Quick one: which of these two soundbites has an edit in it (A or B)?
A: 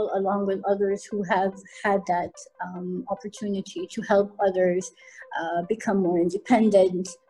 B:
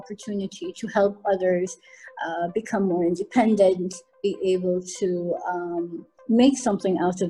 B